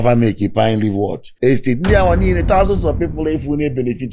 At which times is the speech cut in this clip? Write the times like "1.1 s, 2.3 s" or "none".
none